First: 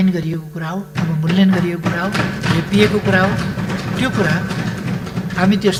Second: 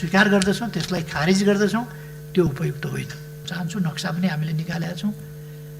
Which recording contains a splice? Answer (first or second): second